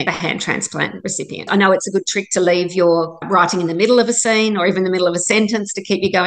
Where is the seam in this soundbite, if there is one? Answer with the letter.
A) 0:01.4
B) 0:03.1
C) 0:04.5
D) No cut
A